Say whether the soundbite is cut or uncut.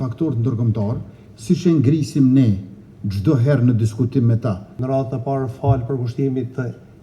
cut